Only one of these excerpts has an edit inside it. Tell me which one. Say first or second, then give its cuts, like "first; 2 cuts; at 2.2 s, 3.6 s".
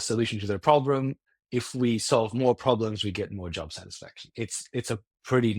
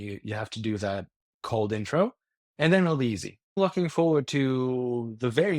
second; 1 cut; at 3.6 s